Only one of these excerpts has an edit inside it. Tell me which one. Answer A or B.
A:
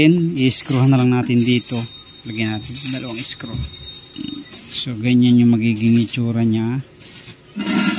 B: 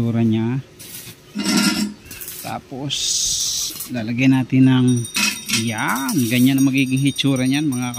A